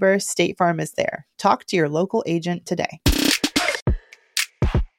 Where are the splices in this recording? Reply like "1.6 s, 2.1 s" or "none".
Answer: 3.8 s